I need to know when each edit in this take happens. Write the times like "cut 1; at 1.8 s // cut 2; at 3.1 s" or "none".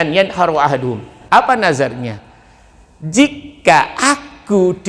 cut 1; at 1.1 s